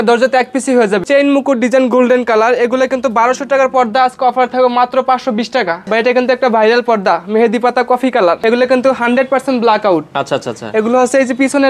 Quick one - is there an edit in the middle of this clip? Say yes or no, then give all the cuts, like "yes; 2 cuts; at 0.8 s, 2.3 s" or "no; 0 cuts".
yes; 3 cuts; at 1.0 s, 5.8 s, 8.4 s